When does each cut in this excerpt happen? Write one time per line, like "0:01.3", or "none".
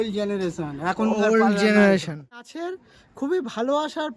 0:02.5